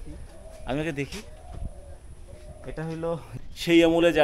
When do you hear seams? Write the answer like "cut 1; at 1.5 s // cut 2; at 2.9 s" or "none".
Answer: cut 1; at 3.3 s